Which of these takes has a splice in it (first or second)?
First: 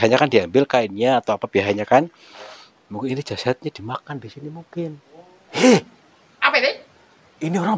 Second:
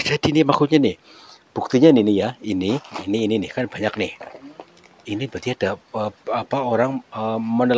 first